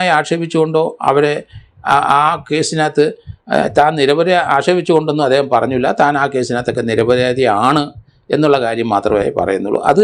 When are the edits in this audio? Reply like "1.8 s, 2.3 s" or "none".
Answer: none